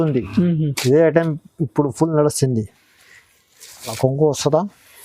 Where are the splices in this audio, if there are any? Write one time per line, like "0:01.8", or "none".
0:03.9